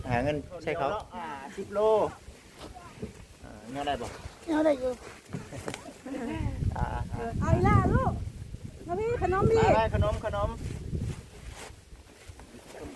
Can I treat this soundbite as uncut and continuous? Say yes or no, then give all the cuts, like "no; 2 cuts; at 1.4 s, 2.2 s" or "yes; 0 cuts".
no; 1 cut; at 1.1 s